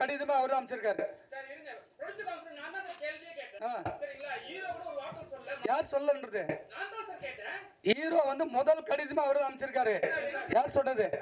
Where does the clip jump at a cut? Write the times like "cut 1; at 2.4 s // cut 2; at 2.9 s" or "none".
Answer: none